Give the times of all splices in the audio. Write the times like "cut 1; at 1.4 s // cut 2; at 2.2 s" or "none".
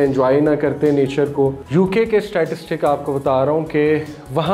cut 1; at 1.6 s

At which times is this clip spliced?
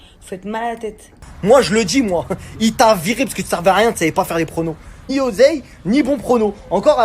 cut 1; at 1.2 s // cut 2; at 5.1 s

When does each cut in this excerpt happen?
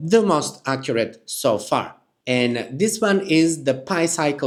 none

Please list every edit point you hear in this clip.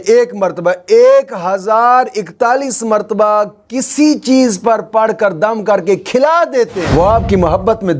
none

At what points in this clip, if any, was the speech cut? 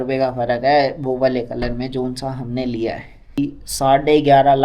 cut 1; at 3.4 s

